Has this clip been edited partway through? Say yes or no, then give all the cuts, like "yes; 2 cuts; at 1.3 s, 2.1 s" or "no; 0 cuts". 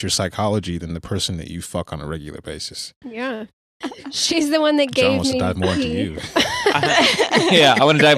yes; 1 cut; at 3.8 s